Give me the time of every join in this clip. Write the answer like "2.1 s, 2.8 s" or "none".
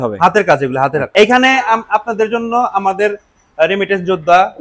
1.1 s

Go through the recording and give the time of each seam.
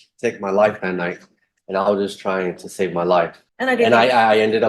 3.4 s

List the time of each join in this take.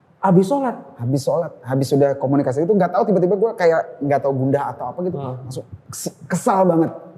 none

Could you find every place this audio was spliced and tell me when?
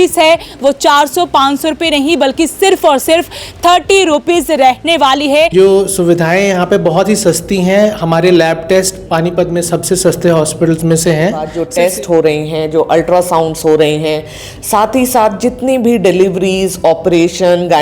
5.5 s, 11.6 s

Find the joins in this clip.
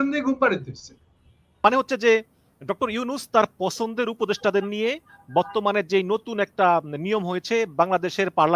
1.6 s

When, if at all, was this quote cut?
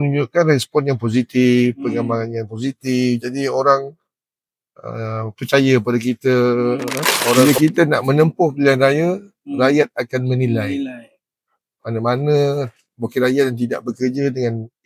7.4 s

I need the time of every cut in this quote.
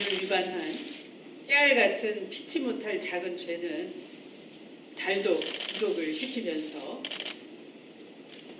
5.4 s

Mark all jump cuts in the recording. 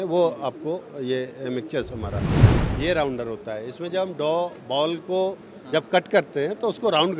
2.4 s

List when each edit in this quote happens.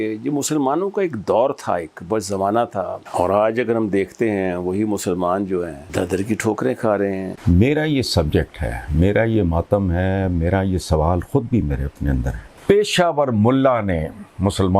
3.0 s, 5.8 s, 7.3 s, 12.4 s

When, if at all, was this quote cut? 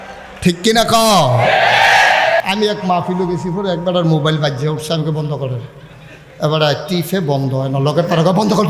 2.4 s

